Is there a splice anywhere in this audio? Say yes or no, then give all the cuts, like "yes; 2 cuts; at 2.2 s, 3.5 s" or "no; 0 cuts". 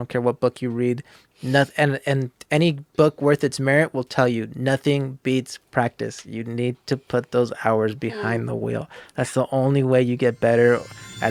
no; 0 cuts